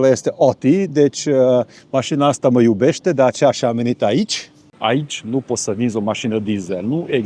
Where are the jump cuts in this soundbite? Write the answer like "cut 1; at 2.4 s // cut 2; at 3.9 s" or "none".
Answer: cut 1; at 4.7 s